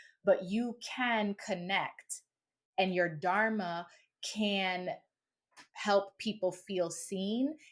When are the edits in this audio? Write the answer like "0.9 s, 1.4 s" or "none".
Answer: none